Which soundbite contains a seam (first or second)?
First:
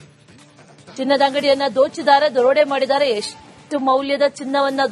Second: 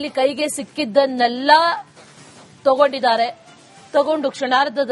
first